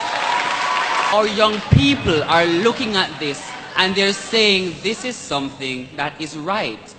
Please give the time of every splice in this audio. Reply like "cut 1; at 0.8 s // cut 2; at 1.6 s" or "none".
cut 1; at 1.1 s